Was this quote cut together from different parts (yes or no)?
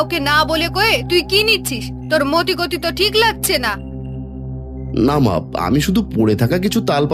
no